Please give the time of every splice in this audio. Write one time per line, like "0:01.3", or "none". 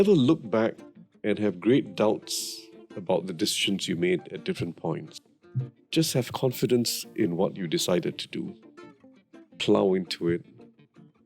0:05.1